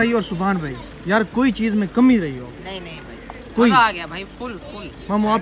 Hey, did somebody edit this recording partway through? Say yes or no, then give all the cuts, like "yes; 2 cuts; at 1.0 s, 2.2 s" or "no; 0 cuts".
no; 0 cuts